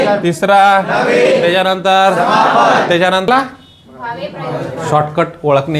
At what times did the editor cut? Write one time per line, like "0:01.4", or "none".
0:03.3

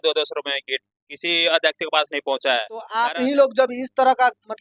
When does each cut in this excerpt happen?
0:02.8

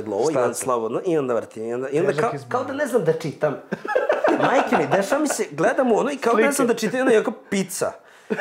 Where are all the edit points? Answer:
none

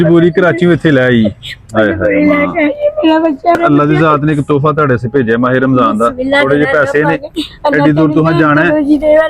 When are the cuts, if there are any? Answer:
0:03.6

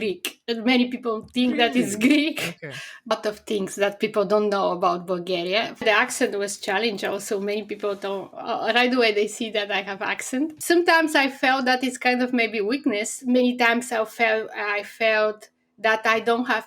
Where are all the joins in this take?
0:03.1
0:05.8
0:10.6
0:13.2

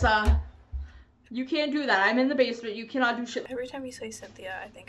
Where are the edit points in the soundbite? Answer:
0:03.4

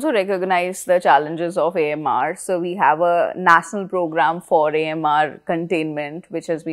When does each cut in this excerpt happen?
none

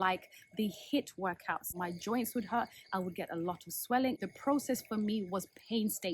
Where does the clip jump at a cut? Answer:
0:01.7
0:04.2

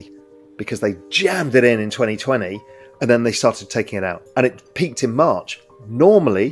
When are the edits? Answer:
0:04.2

